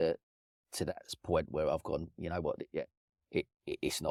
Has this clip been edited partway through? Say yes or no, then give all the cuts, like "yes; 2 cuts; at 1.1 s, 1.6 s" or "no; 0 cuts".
no; 0 cuts